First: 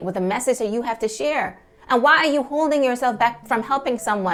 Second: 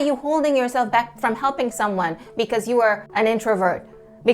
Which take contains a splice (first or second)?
second